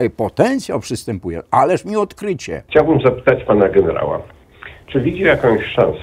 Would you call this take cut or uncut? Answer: cut